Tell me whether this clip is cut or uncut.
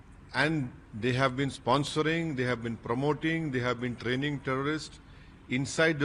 uncut